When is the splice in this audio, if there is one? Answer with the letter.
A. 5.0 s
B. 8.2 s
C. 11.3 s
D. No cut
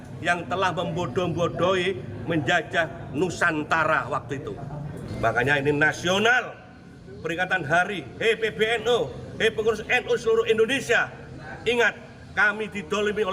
A